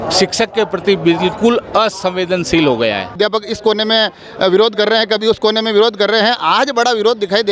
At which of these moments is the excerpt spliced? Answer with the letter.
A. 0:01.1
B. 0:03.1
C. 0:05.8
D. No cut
B